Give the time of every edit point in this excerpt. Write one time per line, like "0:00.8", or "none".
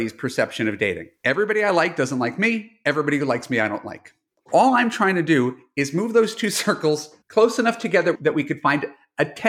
0:01.1